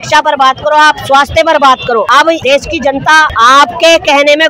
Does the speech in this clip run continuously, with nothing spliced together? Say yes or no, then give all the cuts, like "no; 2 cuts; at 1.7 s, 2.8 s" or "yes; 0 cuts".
no; 2 cuts; at 2.3 s, 3.3 s